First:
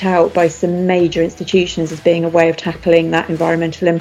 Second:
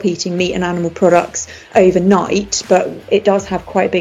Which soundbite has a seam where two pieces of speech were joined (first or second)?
second